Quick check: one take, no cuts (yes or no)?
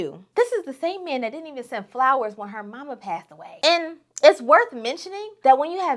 yes